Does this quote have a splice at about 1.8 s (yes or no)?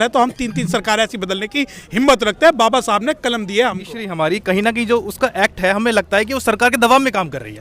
no